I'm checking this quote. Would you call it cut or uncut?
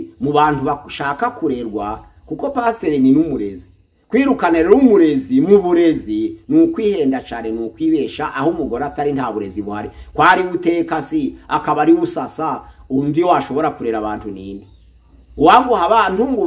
uncut